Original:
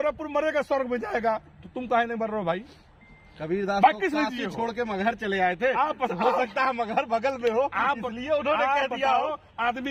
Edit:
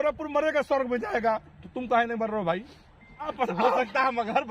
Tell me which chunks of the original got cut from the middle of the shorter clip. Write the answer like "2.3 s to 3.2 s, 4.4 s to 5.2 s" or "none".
3.3 s to 5.9 s